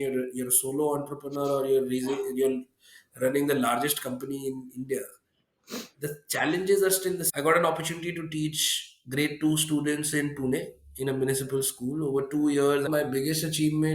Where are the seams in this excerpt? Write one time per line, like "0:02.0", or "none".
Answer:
0:07.3
0:12.9